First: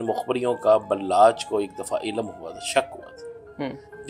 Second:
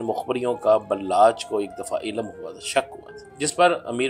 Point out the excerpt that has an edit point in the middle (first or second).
second